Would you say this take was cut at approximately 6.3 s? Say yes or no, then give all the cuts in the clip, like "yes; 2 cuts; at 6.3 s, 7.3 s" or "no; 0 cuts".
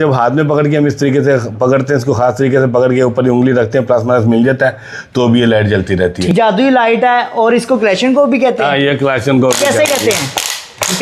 yes; 1 cut; at 6.3 s